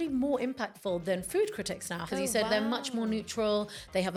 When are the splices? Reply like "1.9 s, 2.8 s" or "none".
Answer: none